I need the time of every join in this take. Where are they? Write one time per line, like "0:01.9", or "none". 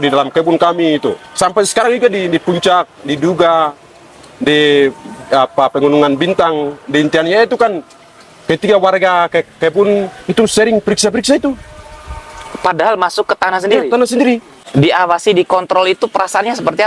0:14.6